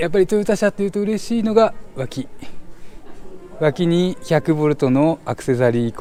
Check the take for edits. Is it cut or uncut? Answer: uncut